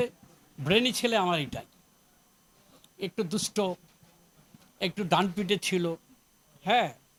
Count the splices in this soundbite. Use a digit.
0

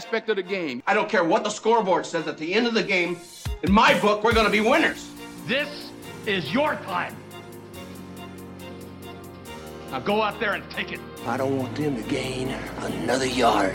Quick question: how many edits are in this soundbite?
0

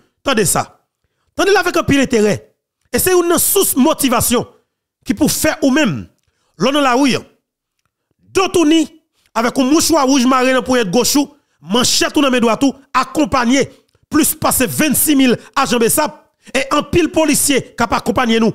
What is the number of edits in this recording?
0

